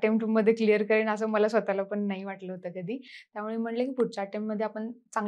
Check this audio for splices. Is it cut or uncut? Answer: uncut